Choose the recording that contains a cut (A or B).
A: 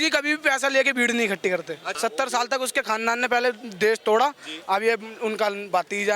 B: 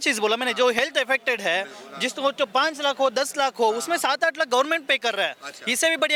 A